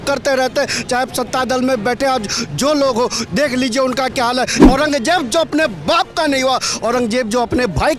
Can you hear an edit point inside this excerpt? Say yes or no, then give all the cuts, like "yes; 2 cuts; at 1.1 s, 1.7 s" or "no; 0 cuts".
yes; 1 cut; at 4.6 s